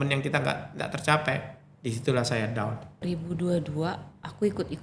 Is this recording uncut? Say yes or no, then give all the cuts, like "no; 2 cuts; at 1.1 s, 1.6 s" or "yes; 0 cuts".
no; 1 cut; at 3.0 s